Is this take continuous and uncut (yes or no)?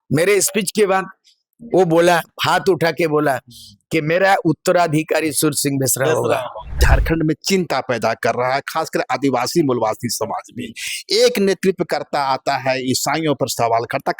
no